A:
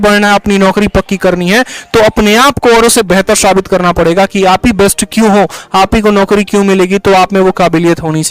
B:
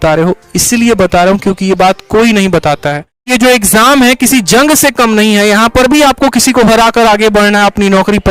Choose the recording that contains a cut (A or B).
B